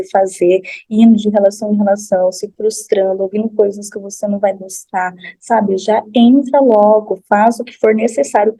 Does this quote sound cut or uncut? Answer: uncut